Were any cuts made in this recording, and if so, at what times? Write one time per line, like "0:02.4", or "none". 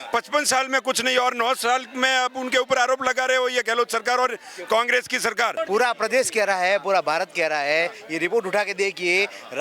0:05.5